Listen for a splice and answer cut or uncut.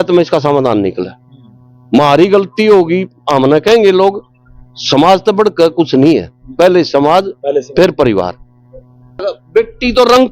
cut